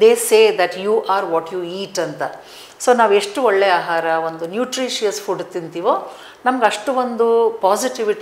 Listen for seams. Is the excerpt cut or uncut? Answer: uncut